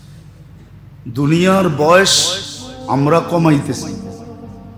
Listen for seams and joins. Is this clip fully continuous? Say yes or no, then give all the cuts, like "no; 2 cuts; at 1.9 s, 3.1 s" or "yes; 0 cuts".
yes; 0 cuts